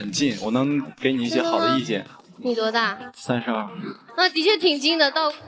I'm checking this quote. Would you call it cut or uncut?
uncut